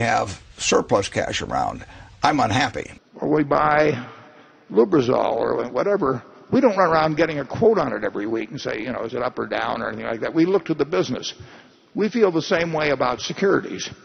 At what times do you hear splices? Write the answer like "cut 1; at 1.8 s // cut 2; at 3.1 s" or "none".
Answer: cut 1; at 2.8 s